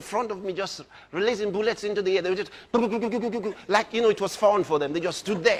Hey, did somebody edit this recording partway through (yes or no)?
no